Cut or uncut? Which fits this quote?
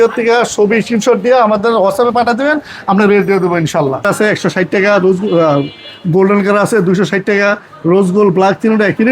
cut